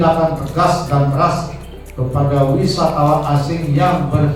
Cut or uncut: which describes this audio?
uncut